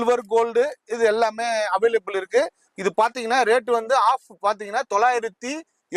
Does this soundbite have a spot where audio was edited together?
no; 0 cuts

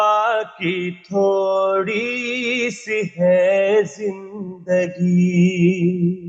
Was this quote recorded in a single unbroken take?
yes; 0 cuts

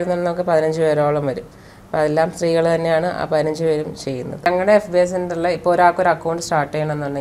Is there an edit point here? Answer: yes; 1 cut; at 4.5 s

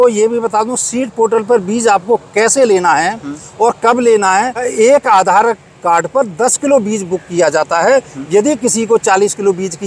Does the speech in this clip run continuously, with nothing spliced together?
no; 1 cut; at 4.7 s

